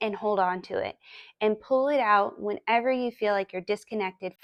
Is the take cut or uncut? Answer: uncut